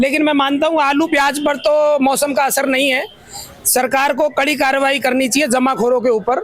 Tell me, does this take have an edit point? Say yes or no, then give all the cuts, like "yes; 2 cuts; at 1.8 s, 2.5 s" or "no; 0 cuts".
no; 0 cuts